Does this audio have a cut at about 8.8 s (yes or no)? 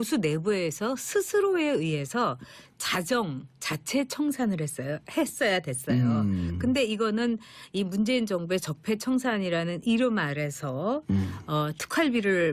no